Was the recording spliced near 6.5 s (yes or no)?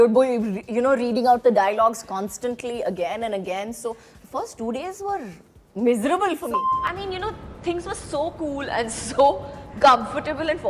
yes